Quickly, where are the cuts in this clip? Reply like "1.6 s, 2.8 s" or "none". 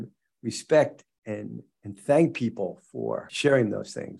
3.3 s